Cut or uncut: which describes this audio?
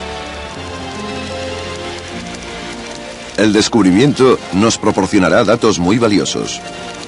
cut